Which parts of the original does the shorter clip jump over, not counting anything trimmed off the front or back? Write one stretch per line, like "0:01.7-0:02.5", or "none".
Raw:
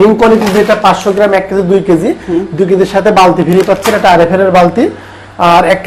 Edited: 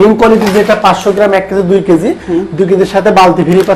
none